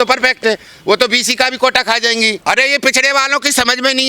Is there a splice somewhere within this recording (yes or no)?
yes